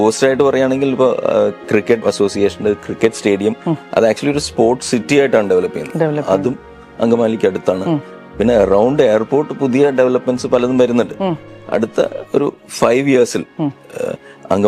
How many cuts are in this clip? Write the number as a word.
two